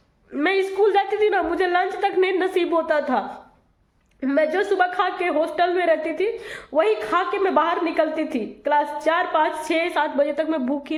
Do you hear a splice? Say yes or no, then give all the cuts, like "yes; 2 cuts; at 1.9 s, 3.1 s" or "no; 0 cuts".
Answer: no; 0 cuts